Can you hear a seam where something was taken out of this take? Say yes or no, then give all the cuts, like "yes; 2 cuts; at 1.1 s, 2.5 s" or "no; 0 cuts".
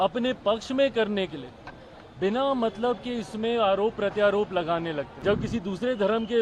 yes; 1 cut; at 5.1 s